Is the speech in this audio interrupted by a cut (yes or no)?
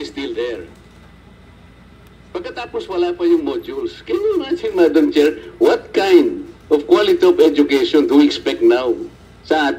no